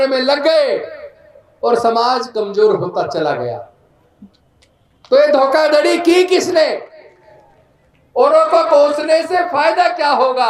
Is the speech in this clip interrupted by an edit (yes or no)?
no